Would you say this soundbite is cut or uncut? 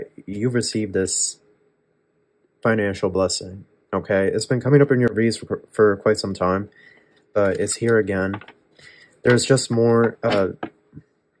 uncut